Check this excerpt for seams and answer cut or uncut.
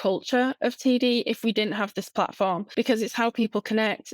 cut